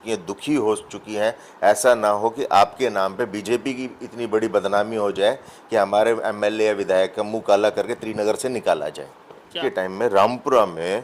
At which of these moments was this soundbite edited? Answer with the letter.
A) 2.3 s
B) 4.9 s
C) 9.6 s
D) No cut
C